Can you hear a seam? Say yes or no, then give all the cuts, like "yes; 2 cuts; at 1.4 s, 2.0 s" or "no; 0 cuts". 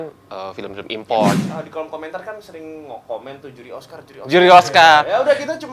yes; 1 cut; at 1.5 s